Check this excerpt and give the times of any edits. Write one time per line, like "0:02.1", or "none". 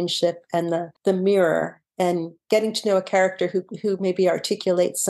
0:00.9
0:02.3